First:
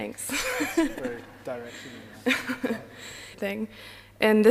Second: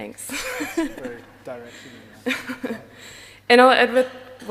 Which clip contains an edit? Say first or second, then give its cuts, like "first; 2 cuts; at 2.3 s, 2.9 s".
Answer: second; 1 cut; at 3.3 s